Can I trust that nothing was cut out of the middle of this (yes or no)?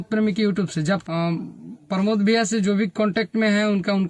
no